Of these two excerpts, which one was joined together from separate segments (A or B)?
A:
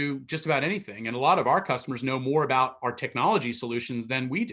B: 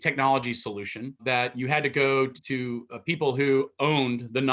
B